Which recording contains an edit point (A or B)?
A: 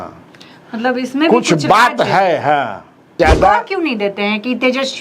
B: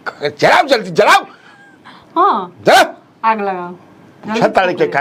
A